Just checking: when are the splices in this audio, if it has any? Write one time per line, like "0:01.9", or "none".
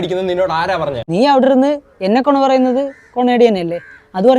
0:01.0